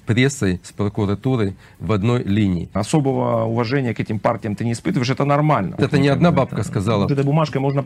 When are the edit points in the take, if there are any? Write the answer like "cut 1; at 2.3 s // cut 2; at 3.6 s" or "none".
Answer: cut 1; at 2.8 s // cut 2; at 5.8 s // cut 3; at 7.1 s